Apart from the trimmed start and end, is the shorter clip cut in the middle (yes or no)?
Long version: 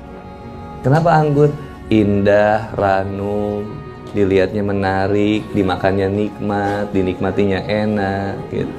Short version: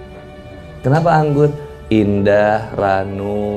no